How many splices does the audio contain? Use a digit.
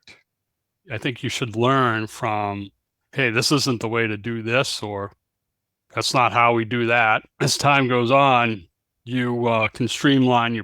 2